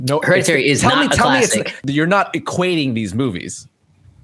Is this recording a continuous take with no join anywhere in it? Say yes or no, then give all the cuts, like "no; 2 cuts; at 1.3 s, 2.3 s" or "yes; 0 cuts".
no; 1 cut; at 1.8 s